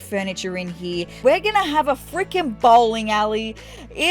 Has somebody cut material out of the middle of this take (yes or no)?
yes